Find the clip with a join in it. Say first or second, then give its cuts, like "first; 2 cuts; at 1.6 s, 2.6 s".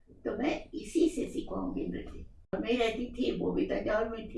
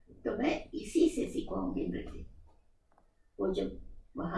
first; 1 cut; at 2.5 s